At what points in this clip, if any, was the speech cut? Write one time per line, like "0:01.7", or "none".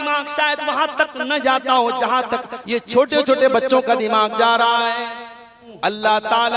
0:05.6